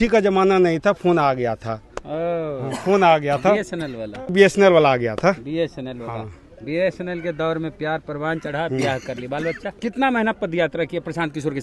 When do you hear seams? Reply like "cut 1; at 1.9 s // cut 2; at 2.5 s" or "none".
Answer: cut 1; at 4.3 s // cut 2; at 9.8 s